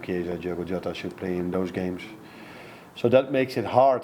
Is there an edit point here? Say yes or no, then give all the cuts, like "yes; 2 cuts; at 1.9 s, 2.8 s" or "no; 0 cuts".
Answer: no; 0 cuts